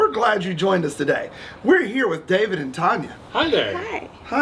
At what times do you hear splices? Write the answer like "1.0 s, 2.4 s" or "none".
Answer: 3.2 s